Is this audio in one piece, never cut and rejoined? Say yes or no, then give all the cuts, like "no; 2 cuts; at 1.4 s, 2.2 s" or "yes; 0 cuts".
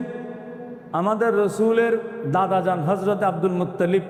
yes; 0 cuts